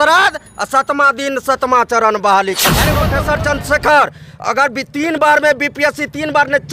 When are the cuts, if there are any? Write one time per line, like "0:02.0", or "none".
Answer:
0:03.1